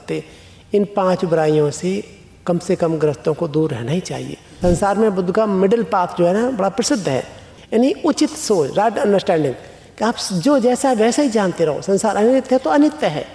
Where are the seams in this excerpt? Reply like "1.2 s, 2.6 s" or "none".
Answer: 4.6 s, 7.6 s